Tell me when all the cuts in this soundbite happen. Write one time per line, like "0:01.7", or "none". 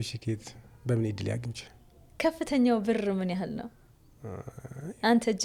none